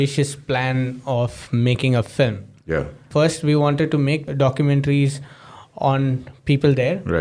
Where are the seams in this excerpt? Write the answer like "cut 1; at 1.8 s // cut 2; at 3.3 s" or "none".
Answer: cut 1; at 3.0 s // cut 2; at 4.3 s